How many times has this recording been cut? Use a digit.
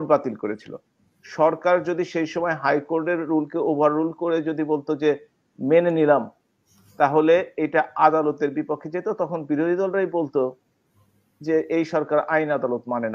0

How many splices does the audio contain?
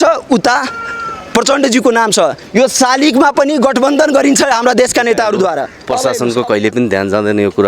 1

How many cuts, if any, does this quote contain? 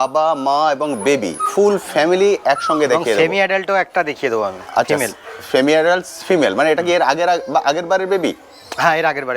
0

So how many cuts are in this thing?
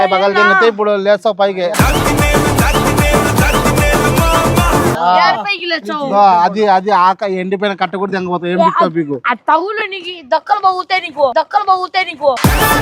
1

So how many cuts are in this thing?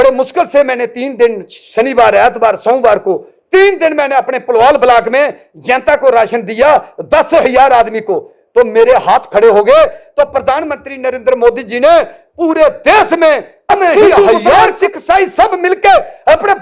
1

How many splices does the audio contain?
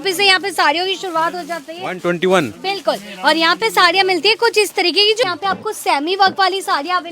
1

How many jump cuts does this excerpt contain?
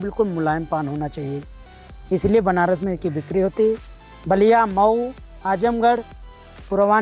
0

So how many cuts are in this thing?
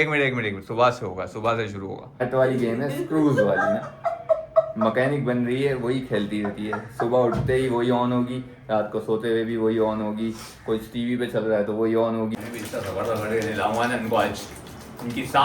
2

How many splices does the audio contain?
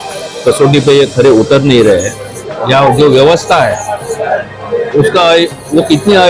1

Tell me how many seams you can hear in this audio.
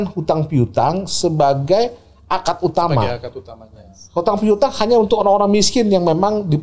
0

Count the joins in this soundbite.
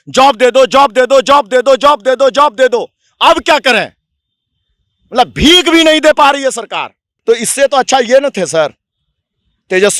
1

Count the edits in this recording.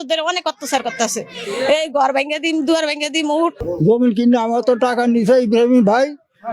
1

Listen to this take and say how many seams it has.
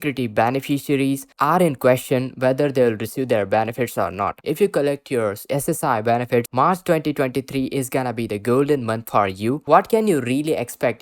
3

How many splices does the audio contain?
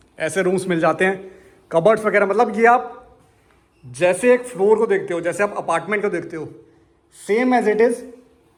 0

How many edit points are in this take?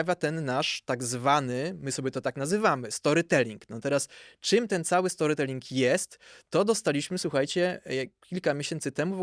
0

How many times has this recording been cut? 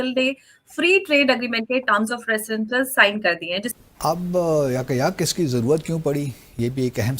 1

